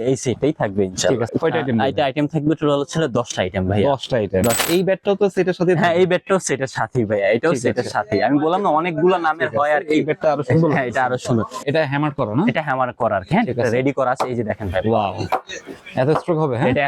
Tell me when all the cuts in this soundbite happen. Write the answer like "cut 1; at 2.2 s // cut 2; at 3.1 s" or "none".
cut 1; at 1.3 s // cut 2; at 4.6 s // cut 3; at 11.6 s